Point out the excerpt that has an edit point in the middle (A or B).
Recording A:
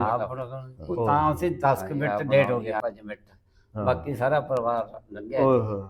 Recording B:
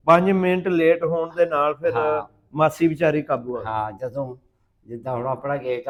A